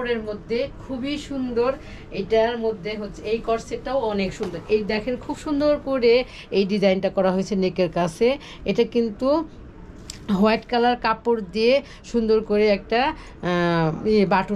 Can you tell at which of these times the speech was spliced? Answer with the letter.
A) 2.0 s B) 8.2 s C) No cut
C